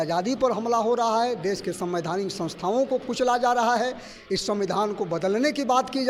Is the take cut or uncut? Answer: uncut